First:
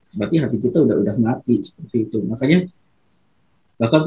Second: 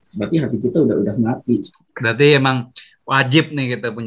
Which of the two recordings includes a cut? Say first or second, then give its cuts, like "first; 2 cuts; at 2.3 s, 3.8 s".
second; 1 cut; at 1.8 s